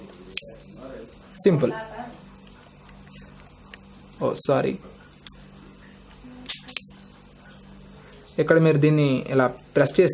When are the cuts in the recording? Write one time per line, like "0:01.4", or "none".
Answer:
none